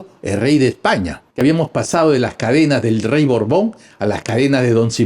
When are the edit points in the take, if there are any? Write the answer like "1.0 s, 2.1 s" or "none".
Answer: 1.3 s

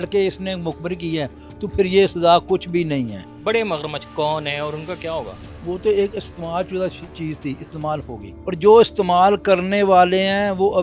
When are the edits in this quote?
3.3 s, 5.4 s, 8.3 s

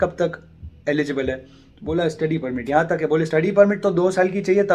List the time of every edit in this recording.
3.3 s

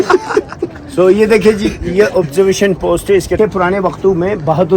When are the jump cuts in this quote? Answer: 3.4 s

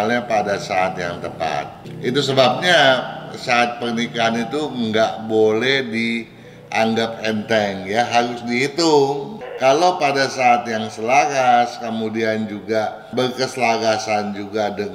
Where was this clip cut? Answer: 1.8 s, 9.3 s, 13.0 s

